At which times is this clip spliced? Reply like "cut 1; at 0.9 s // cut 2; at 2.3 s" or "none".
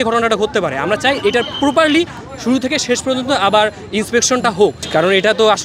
none